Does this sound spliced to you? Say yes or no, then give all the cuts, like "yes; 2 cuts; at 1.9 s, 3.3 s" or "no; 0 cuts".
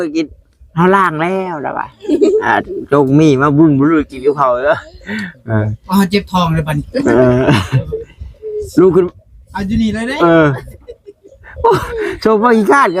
no; 0 cuts